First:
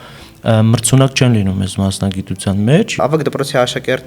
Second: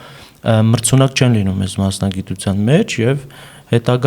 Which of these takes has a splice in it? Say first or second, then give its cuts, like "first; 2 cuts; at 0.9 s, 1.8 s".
first; 1 cut; at 3.0 s